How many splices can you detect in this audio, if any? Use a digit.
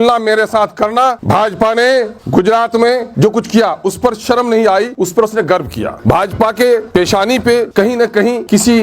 7